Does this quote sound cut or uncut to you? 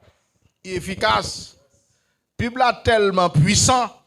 cut